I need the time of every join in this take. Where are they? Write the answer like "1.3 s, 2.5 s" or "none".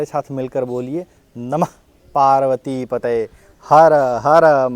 none

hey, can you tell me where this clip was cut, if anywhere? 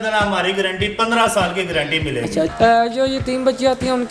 2.5 s

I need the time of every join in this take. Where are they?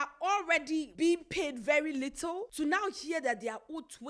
0.9 s, 2.5 s

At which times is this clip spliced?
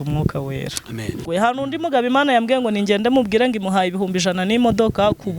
1.2 s

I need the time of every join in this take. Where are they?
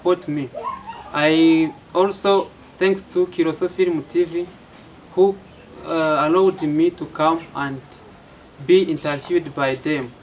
none

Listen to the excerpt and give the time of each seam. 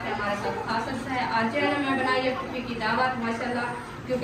none

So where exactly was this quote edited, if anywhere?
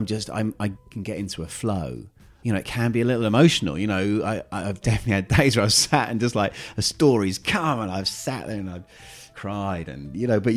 0.9 s, 2.2 s, 9.3 s

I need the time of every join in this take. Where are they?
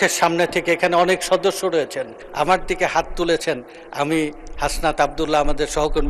2.2 s

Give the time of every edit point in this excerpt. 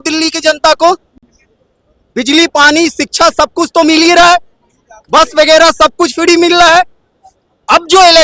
none

